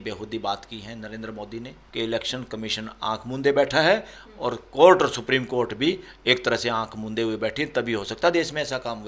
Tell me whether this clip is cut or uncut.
cut